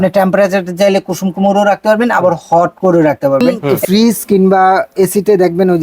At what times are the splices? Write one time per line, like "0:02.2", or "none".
0:03.6